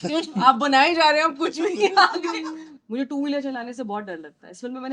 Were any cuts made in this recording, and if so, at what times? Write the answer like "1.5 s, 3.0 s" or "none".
2.6 s